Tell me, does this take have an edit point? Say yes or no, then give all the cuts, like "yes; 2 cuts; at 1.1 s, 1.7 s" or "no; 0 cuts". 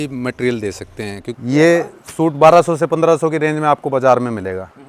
yes; 1 cut; at 1.4 s